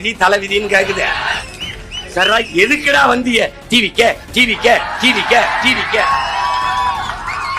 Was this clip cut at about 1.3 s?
yes; 1 cut; at 1.3 s

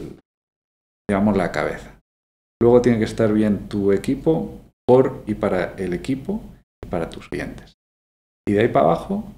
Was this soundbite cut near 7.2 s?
yes; 1 cut; at 7.2 s

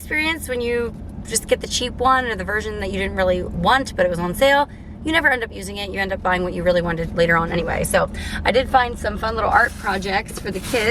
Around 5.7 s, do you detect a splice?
no; 0 cuts

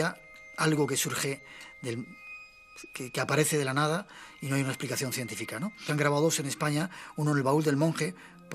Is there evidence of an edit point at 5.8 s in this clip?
no; 0 cuts

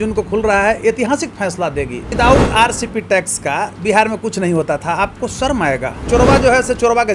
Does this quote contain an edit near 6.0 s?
yes; 2 cuts; at 2.1 s, 6.0 s

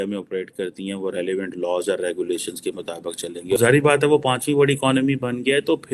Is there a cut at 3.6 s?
yes; 1 cut; at 3.6 s

